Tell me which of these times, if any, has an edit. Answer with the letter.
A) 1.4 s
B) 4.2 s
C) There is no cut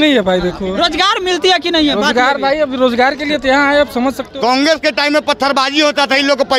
B